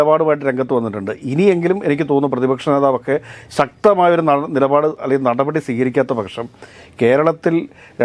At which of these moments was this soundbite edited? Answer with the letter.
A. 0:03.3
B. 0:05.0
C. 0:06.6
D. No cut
D